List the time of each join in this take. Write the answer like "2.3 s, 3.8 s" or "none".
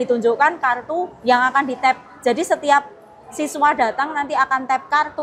none

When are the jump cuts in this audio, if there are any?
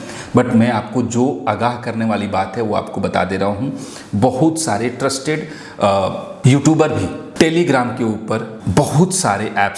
6.3 s, 7.2 s, 8.6 s

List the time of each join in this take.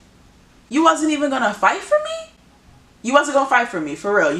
none

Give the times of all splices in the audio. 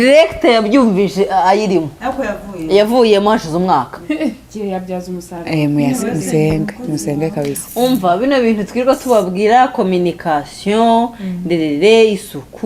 4.0 s

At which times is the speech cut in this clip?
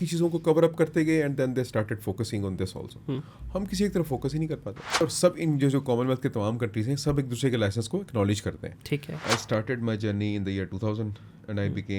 5.0 s, 9.2 s

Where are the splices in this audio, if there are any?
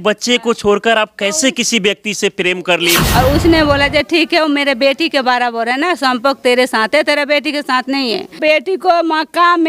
3.0 s, 8.4 s

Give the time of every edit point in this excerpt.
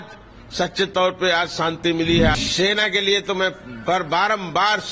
2.4 s

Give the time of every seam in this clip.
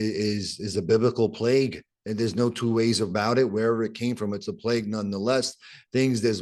none

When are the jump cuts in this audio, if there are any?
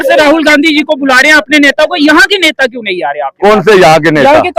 none

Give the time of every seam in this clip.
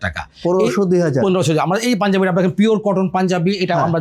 none

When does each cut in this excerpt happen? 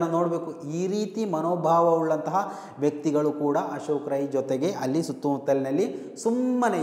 none

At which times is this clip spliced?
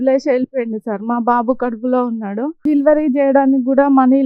none

